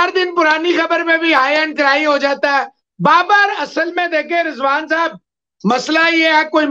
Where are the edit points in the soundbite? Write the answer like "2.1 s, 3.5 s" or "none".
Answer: none